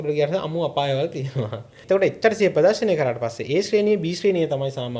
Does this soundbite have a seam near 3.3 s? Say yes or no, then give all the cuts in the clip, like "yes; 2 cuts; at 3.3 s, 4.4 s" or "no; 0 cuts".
no; 1 cut; at 1.7 s